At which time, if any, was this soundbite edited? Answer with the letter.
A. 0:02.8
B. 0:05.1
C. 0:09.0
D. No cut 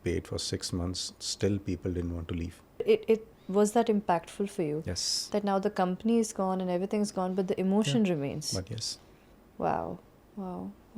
A